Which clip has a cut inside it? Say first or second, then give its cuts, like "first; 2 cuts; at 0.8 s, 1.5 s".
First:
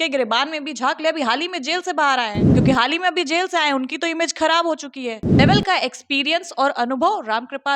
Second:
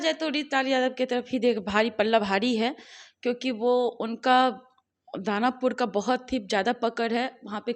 first; 2 cuts; at 2.5 s, 5.4 s